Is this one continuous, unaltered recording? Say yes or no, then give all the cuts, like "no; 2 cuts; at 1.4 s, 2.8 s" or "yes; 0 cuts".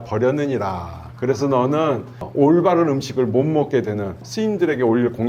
no; 2 cuts; at 2.3 s, 4.2 s